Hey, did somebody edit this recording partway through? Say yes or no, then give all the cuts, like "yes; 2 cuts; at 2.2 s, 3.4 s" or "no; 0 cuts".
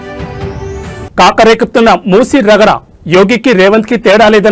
no; 0 cuts